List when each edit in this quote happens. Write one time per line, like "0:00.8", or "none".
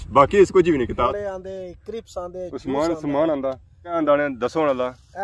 0:01.1
0:03.9